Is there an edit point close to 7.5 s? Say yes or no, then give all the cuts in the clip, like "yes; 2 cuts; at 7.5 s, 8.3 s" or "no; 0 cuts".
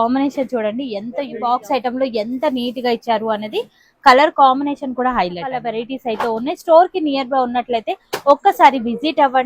no; 2 cuts; at 1.4 s, 5.8 s